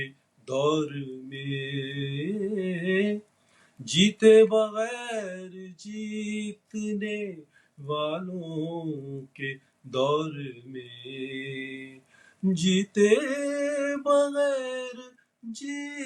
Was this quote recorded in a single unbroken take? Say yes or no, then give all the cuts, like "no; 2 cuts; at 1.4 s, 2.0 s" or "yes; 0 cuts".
yes; 0 cuts